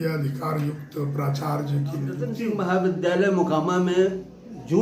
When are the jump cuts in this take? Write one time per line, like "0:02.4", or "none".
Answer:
0:02.4